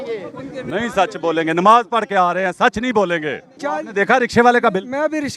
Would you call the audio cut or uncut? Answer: cut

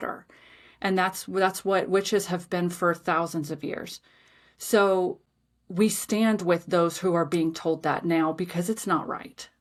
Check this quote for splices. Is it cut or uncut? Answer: uncut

